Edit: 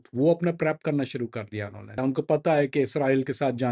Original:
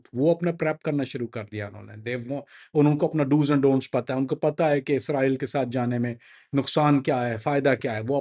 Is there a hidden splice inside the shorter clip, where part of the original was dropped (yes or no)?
yes